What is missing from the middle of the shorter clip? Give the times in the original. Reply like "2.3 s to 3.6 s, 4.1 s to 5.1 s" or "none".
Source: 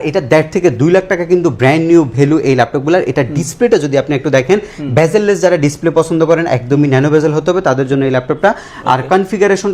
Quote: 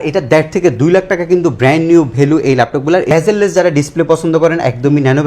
3.1 s to 5.0 s